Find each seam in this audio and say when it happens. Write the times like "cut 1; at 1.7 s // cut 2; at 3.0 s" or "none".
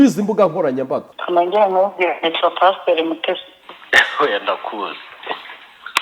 cut 1; at 1.1 s